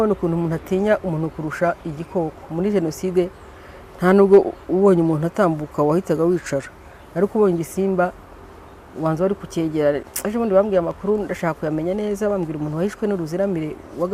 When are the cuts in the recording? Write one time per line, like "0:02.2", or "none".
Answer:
none